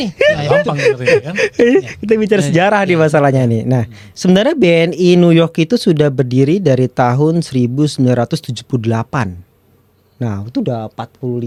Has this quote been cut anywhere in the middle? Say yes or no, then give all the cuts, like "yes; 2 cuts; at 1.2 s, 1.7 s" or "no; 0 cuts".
no; 0 cuts